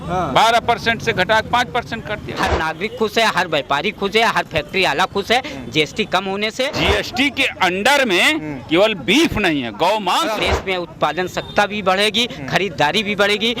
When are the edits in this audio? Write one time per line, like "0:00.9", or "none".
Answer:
0:02.2
0:06.8
0:10.5